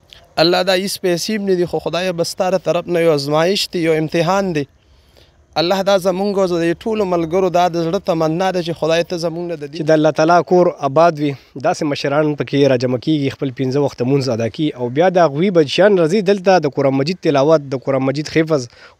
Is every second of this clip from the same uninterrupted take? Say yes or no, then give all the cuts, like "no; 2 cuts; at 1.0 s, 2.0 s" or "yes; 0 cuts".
no; 1 cut; at 9.5 s